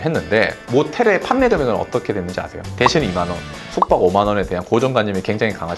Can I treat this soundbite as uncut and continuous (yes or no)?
yes